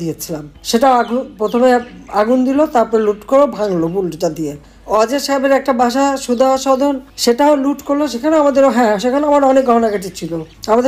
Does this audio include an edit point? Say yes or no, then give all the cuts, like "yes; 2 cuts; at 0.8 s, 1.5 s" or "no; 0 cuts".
no; 0 cuts